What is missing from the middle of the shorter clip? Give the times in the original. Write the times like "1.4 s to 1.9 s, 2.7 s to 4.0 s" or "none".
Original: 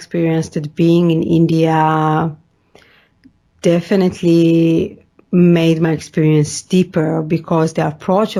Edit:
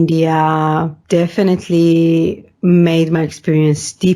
2.4 s to 3.5 s, 5.0 s to 5.1 s